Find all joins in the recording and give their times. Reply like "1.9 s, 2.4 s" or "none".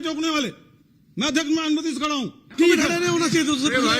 2.5 s